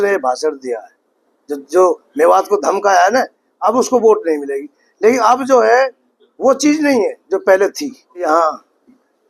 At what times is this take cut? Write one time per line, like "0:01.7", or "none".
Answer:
0:08.3

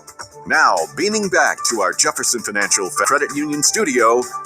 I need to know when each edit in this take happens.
0:03.1

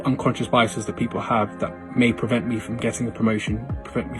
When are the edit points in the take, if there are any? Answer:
none

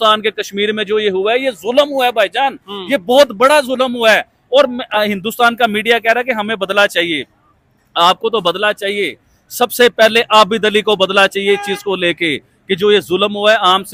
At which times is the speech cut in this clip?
none

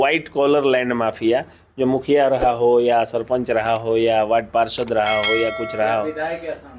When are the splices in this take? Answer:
none

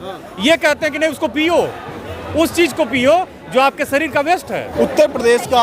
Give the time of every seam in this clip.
0:04.7

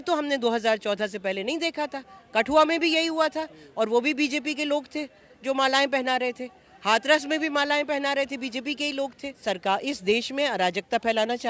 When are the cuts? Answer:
0:09.4

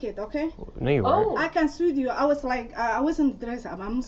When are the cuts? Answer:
0:01.8

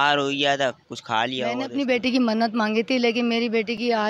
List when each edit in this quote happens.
0:01.6

